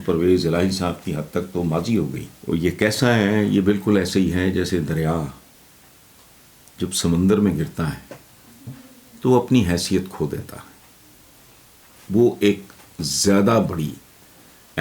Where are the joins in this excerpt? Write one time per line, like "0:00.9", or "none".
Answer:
0:02.3